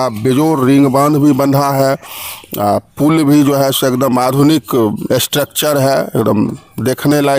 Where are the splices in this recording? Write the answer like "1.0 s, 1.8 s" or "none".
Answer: none